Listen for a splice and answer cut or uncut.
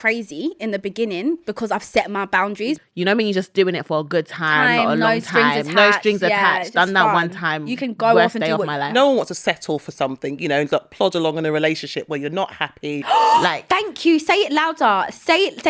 cut